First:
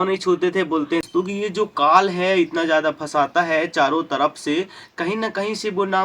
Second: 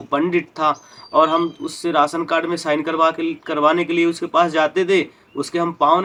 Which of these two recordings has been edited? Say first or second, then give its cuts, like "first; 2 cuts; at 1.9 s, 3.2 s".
first; 1 cut; at 1.1 s